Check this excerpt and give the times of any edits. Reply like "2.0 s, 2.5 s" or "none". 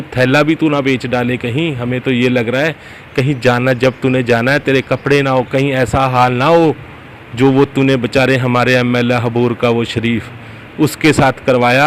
none